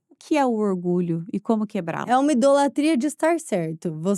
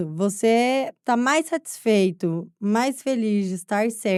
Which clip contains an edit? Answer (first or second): first